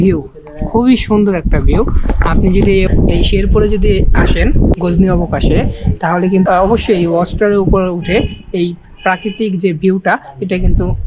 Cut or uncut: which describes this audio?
uncut